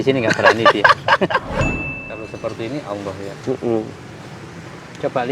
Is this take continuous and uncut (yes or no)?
no